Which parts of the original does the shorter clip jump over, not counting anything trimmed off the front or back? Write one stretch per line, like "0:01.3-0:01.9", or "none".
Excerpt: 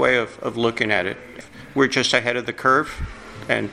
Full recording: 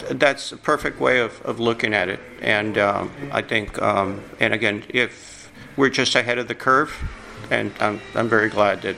0:02.3-0:05.3